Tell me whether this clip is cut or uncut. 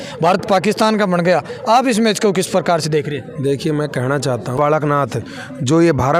cut